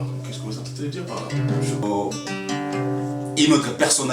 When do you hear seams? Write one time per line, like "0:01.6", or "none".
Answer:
0:01.8